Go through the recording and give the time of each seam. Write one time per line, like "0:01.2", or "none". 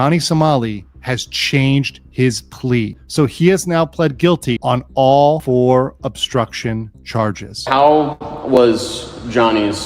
0:02.9
0:07.6